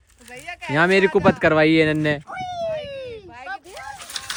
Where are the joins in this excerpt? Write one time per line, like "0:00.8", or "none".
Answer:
none

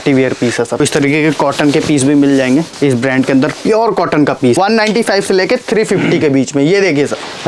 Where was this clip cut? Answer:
0:00.8
0:04.6

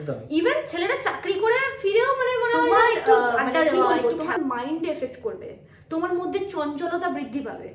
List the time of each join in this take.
0:03.7

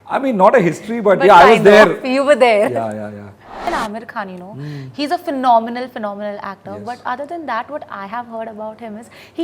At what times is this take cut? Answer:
0:03.6

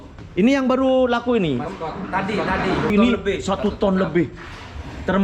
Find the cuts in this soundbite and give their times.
0:02.9

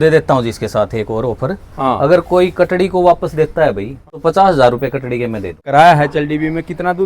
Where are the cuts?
0:04.2
0:05.6

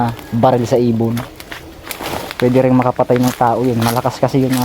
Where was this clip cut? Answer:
0:02.3

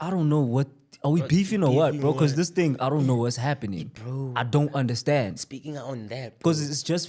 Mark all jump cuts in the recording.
none

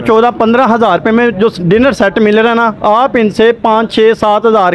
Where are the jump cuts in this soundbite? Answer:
none

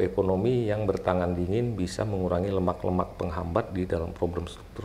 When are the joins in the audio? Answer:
none

